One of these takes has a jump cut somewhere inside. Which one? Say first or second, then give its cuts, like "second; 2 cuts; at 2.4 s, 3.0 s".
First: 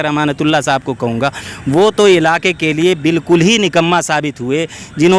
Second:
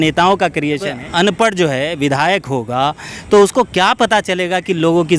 second; 1 cut; at 0.9 s